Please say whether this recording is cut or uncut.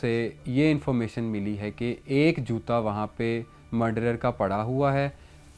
uncut